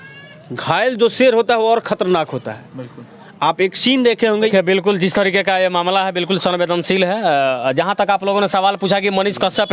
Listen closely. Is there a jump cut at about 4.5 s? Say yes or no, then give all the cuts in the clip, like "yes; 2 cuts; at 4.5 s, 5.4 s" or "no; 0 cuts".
yes; 1 cut; at 4.5 s